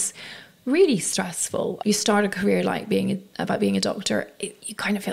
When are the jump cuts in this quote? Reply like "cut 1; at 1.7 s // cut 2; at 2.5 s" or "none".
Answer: cut 1; at 1.8 s